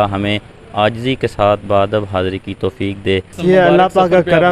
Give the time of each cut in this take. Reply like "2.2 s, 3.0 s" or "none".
3.4 s